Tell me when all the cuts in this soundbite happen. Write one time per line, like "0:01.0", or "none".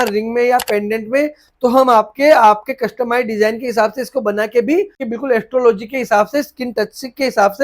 0:05.1